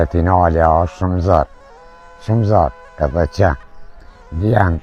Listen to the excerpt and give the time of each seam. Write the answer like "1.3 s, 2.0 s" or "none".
none